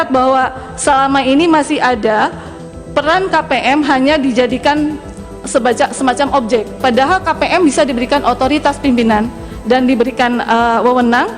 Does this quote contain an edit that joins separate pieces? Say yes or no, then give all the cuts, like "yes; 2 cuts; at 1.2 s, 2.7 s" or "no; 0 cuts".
no; 0 cuts